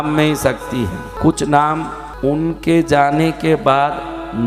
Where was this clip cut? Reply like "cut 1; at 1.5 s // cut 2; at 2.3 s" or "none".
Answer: cut 1; at 1.1 s // cut 2; at 2.0 s